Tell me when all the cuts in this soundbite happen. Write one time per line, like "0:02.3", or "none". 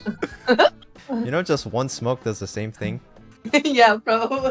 0:00.9